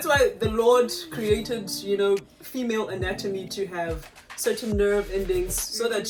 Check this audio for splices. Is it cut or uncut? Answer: uncut